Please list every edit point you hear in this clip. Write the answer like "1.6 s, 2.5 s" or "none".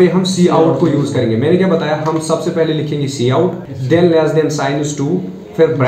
3.7 s